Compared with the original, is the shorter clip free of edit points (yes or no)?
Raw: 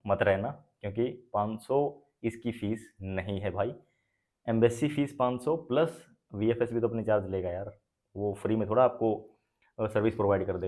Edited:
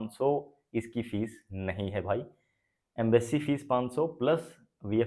yes